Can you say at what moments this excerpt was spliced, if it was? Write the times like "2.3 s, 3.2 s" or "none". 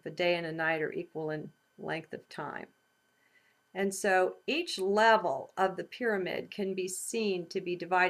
none